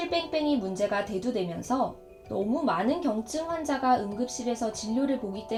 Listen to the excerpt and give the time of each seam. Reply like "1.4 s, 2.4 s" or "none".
none